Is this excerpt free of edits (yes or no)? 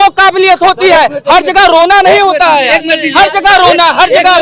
yes